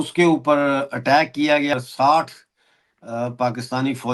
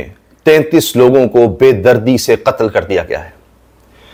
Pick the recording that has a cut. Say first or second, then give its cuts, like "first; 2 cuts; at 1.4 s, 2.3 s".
first; 1 cut; at 1.7 s